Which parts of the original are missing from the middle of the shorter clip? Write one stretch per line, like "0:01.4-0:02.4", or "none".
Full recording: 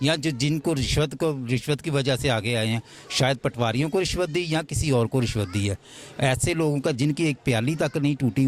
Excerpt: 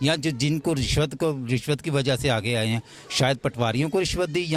none